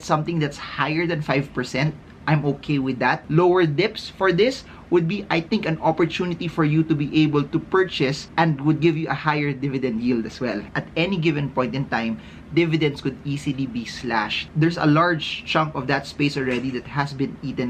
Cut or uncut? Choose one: cut